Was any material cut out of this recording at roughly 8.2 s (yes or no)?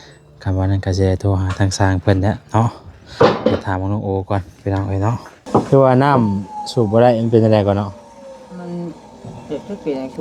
no